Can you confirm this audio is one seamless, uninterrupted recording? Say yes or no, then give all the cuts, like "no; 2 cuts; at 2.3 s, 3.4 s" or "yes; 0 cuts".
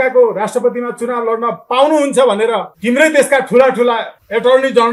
yes; 0 cuts